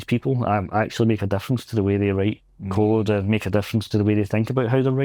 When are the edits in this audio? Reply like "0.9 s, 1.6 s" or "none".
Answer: none